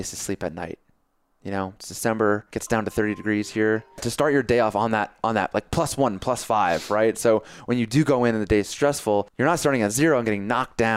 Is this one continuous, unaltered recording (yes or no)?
no